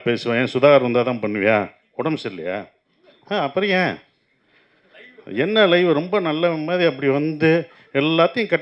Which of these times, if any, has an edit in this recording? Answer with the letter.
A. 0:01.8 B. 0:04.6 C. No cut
C